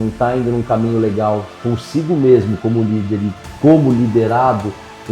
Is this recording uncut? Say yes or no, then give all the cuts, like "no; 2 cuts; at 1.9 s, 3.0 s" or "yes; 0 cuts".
yes; 0 cuts